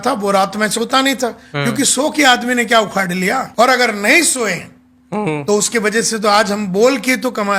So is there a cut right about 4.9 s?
no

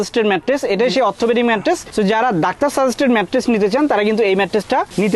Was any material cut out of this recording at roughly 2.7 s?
no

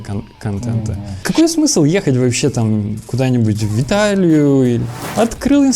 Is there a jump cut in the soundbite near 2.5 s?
no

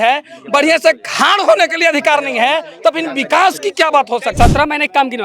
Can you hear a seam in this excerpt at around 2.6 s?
no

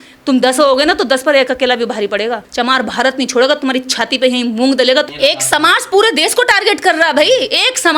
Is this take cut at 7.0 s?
no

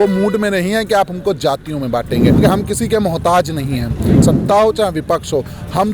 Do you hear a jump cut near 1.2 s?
no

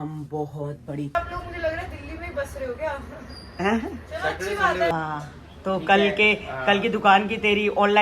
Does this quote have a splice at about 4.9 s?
yes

